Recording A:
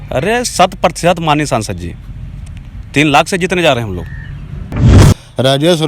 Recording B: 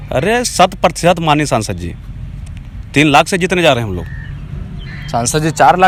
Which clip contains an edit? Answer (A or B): A